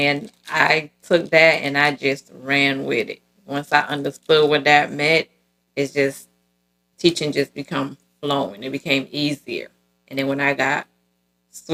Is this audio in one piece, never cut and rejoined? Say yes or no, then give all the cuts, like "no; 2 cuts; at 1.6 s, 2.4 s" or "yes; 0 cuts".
yes; 0 cuts